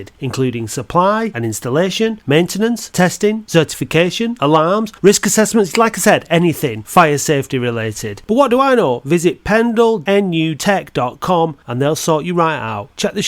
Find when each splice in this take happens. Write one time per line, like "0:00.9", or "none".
0:10.3